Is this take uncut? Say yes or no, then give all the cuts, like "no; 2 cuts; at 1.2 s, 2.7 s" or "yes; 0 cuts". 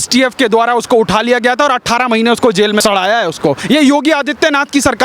no; 1 cut; at 3.6 s